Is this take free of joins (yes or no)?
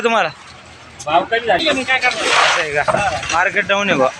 no